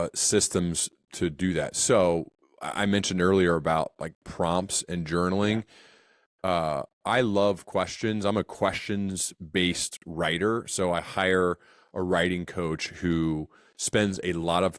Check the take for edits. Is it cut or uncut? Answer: uncut